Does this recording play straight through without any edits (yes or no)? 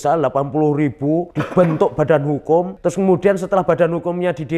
no